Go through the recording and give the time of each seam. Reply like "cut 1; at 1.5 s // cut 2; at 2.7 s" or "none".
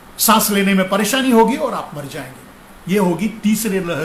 none